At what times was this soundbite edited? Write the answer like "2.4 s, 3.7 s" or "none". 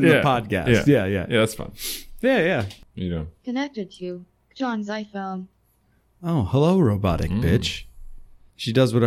2.8 s